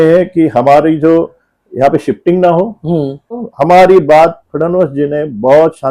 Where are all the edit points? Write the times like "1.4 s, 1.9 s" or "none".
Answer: 3.5 s